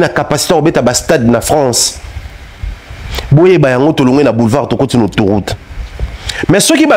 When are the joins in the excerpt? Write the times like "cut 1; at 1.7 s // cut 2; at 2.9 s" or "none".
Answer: none